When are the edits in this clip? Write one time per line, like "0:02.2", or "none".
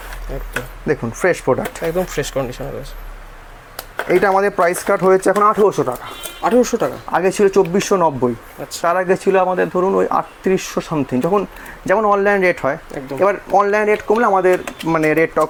none

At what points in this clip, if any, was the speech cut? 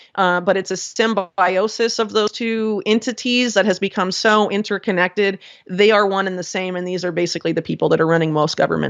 none

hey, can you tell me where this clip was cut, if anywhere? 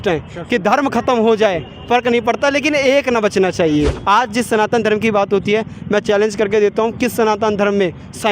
0:04.0

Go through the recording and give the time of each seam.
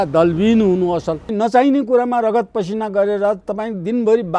0:01.3

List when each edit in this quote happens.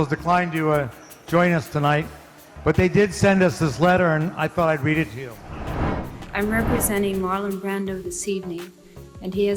0:05.7

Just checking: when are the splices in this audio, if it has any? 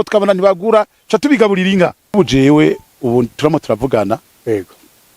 0:02.1

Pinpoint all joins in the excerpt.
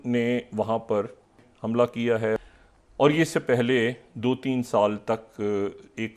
0:01.4
0:02.4

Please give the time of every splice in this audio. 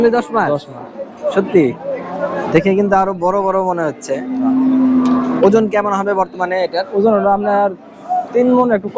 none

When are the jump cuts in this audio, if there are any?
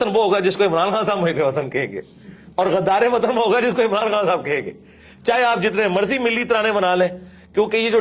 none

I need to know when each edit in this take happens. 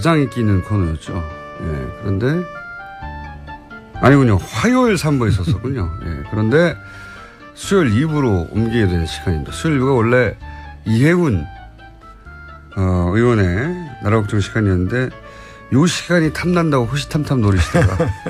none

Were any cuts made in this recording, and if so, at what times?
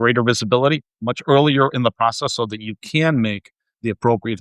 0:00.9

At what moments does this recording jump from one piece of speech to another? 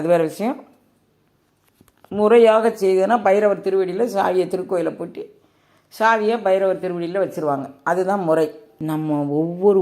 0:08.7

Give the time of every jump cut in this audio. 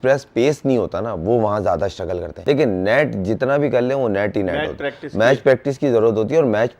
0:02.3

